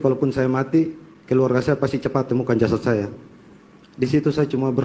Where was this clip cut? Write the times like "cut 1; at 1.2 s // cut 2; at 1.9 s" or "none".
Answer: none